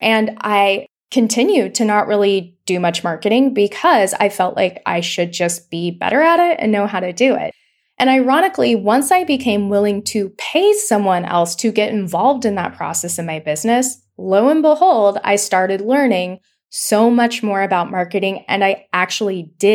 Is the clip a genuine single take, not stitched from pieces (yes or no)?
no